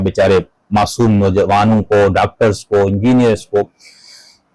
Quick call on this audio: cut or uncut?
uncut